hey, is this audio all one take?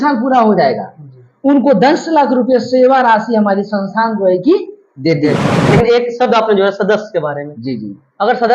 no; 1 cut; at 5.6 s

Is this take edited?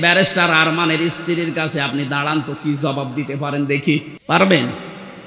yes; 1 cut; at 4.1 s

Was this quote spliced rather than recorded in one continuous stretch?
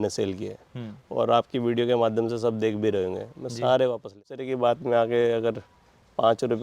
yes; 1 cut; at 4.5 s

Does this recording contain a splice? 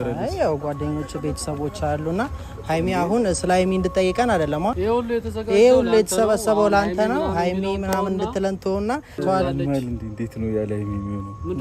yes; 2 cuts; at 4.8 s, 9.2 s

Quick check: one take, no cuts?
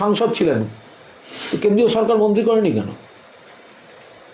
no; 1 cut; at 2.7 s

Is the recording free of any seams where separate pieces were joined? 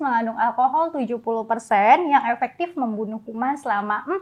yes; 0 cuts

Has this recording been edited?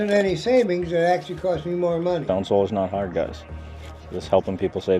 yes; 1 cut; at 2.2 s

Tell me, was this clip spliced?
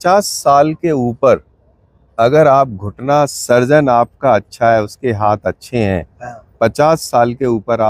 no; 0 cuts

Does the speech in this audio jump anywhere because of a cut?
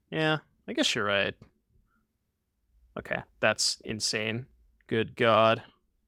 no; 0 cuts

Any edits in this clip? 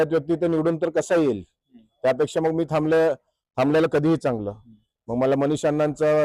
no; 0 cuts

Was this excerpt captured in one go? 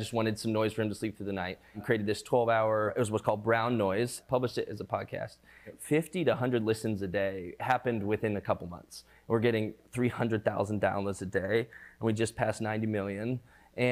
no; 5 cuts; at 1.8 s, 2.9 s, 4.2 s, 5.7 s, 9.1 s

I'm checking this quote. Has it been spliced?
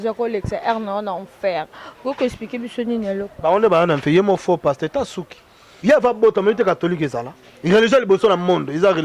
yes; 1 cut; at 5.6 s

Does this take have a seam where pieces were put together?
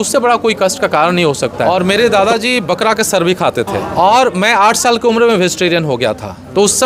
yes; 2 cuts; at 1.9 s, 3.8 s

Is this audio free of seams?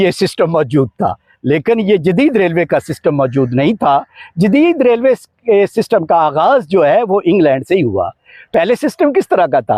yes; 0 cuts

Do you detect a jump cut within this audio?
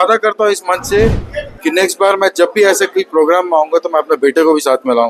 no; 0 cuts

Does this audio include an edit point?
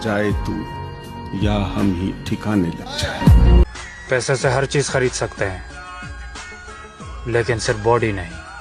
no; 0 cuts

